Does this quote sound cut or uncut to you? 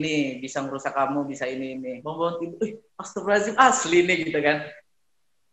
cut